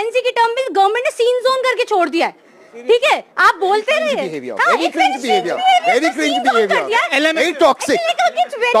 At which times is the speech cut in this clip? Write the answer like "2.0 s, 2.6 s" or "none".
none